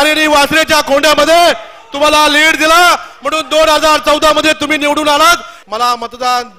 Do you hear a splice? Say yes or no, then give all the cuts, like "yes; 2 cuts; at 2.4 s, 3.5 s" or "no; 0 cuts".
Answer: yes; 1 cut; at 5.5 s